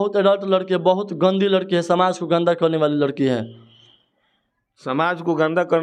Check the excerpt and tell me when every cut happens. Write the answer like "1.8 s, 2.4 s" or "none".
none